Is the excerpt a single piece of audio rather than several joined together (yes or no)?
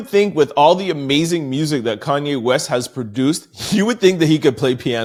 yes